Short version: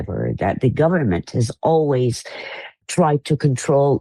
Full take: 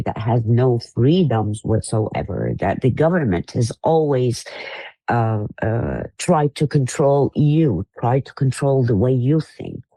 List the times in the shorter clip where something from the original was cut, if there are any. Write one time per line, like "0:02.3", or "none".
0:02.7

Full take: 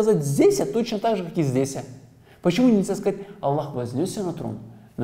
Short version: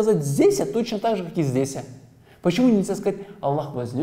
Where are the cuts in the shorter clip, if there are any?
none

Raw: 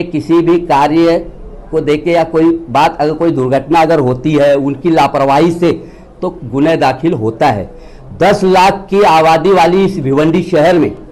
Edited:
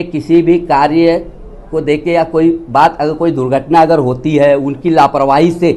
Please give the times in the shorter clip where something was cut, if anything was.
none

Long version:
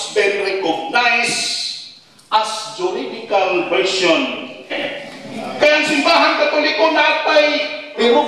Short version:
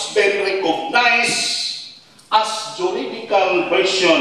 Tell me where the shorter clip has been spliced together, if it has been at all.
none

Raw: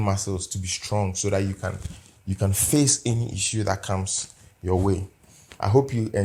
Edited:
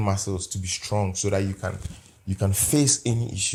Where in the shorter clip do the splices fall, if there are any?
none

